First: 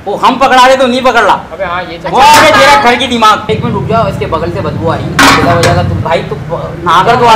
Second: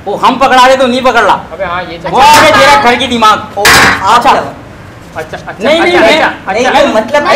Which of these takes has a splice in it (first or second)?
first